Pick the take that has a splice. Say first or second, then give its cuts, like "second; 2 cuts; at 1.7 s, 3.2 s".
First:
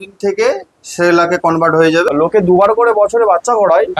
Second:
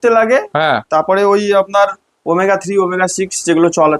first; 1 cut; at 2.1 s